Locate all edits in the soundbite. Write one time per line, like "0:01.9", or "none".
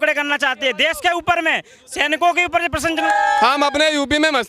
0:03.0